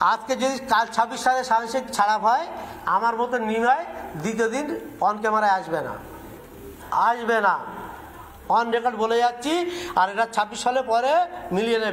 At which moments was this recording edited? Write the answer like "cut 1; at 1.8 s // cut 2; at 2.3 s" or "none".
none